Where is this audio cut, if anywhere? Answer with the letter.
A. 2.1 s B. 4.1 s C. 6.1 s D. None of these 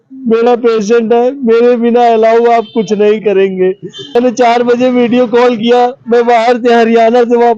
B